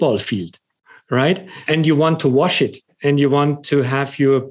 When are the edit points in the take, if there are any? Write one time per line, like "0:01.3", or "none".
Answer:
none